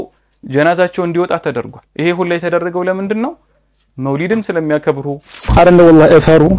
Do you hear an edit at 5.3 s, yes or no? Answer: yes